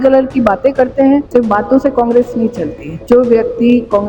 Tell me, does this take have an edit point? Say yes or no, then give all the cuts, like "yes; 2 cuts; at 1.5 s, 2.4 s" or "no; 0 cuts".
yes; 2 cuts; at 1.3 s, 2.9 s